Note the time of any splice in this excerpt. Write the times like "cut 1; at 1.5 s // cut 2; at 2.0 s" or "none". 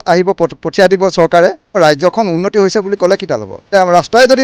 cut 1; at 1.8 s // cut 2; at 3.5 s